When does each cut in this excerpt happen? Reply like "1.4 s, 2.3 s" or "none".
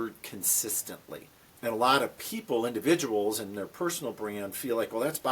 1.5 s